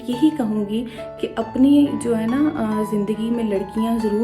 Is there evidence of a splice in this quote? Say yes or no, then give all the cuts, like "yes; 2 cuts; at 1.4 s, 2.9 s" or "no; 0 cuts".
no; 0 cuts